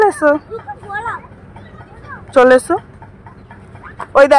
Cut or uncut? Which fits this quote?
uncut